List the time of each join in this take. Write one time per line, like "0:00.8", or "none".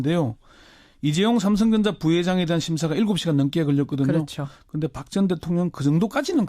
0:03.5